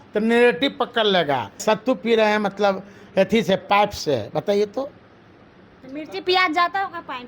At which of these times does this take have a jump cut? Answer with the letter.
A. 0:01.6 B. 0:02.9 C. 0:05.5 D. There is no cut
A